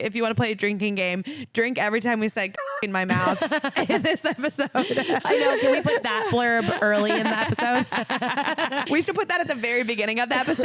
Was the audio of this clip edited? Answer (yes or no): yes